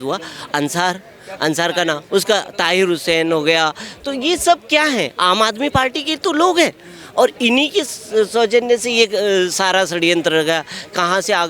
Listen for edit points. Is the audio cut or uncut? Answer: uncut